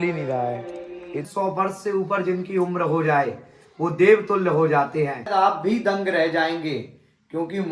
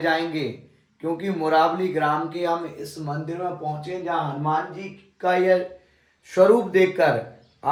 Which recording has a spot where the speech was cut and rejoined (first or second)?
first